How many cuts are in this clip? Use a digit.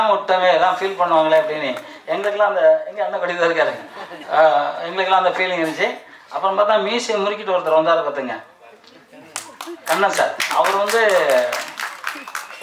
0